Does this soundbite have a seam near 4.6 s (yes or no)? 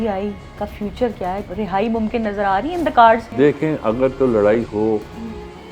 no